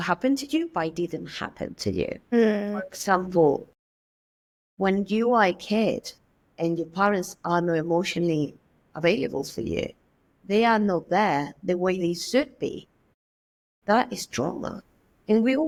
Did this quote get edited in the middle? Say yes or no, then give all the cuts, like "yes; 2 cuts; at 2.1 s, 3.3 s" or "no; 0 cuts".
no; 0 cuts